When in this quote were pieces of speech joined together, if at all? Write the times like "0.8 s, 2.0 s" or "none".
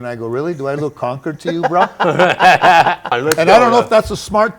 3.2 s